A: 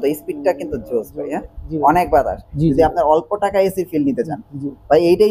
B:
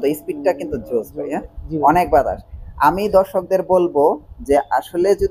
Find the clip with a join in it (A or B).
A